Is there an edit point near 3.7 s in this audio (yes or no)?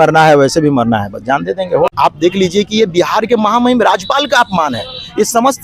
no